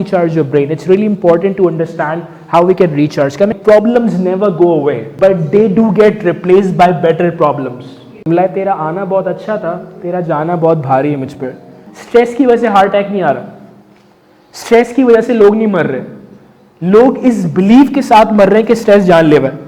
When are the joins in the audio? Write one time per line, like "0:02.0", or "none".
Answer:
0:03.6
0:05.1
0:08.3
0:11.9